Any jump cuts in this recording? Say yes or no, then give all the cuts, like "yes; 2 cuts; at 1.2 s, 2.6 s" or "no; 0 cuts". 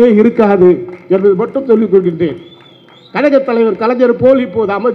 no; 0 cuts